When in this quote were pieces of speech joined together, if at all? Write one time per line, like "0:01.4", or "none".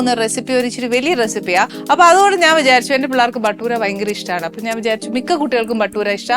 0:01.8